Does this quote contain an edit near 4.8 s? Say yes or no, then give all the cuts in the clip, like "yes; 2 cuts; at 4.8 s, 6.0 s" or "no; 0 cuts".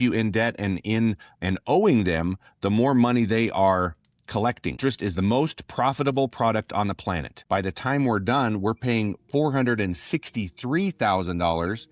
yes; 2 cuts; at 4.8 s, 7.3 s